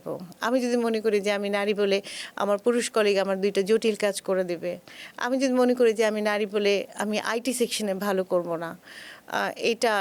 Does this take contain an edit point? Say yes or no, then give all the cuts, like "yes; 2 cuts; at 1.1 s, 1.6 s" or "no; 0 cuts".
no; 0 cuts